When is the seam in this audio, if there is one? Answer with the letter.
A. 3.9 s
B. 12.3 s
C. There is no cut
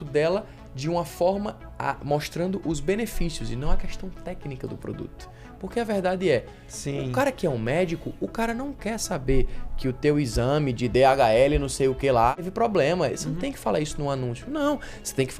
B